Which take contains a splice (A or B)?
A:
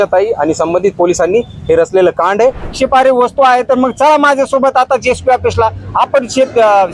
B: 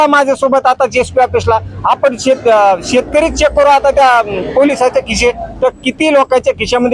A